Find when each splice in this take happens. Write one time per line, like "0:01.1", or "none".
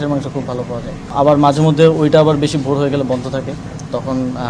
0:01.0